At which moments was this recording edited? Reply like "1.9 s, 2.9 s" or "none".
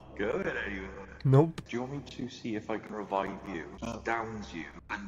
1.0 s, 1.6 s